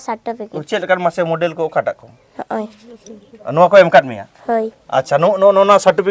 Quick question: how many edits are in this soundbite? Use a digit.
1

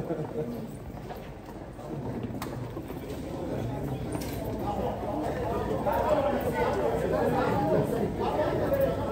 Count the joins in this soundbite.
0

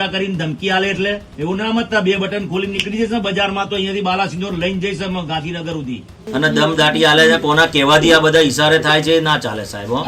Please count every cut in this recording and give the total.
2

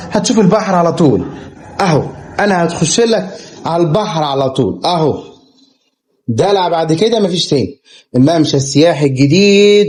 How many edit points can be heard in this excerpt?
0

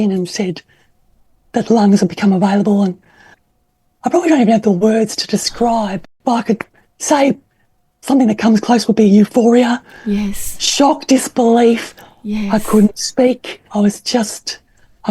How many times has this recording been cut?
2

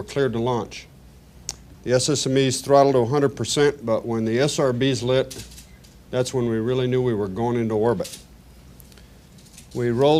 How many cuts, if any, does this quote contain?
0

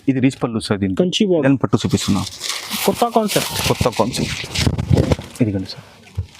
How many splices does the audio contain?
1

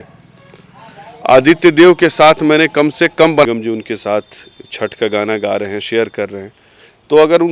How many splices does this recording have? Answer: 1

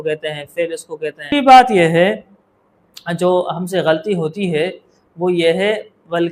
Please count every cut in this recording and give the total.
1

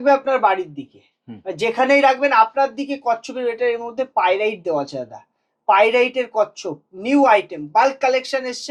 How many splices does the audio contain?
0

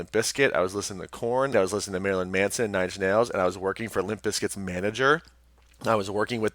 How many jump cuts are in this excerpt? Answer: 1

